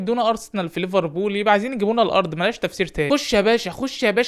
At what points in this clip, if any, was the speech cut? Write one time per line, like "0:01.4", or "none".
0:03.1